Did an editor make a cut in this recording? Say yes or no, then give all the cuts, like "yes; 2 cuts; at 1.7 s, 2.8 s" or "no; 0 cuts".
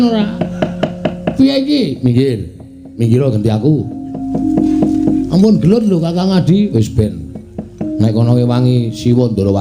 yes; 1 cut; at 4.2 s